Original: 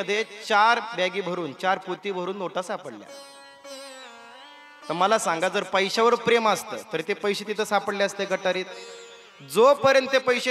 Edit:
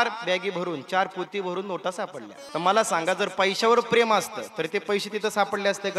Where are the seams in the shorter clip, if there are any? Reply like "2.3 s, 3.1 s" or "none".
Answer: 2.3 s